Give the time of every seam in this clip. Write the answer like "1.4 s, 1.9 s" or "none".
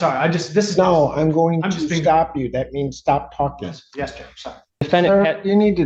4.8 s

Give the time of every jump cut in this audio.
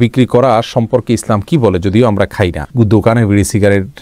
none

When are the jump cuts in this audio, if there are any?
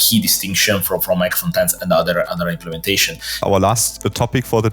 3.3 s

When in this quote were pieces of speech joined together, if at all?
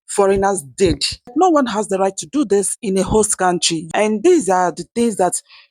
1.3 s, 3.8 s

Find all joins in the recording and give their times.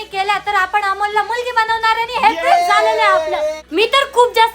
3.6 s

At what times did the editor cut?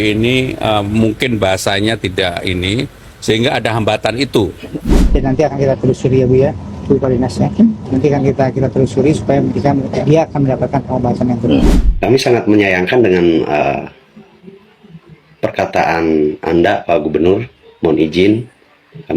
5.1 s, 11.8 s

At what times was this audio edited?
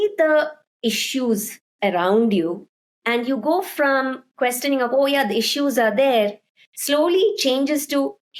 none

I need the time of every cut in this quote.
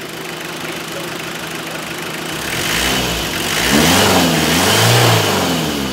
none

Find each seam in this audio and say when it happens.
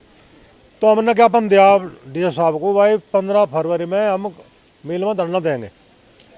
none

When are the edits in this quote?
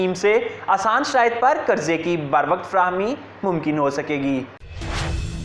4.5 s

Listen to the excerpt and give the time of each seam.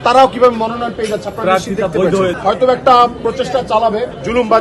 2.4 s

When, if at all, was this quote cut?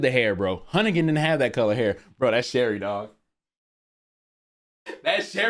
none

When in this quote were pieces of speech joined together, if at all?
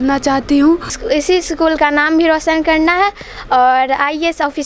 1.0 s

